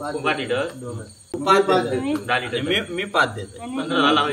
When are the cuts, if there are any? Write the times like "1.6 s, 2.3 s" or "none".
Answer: 1.1 s